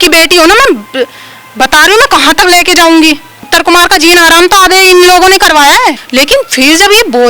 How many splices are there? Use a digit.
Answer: 2